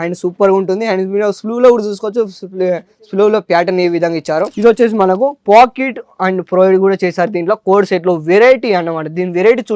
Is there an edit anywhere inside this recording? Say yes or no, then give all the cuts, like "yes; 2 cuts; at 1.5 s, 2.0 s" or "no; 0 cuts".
yes; 1 cut; at 4.5 s